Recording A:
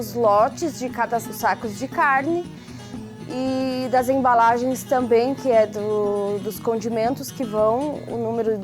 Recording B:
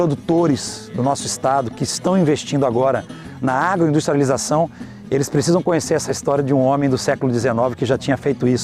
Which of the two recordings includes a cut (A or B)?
A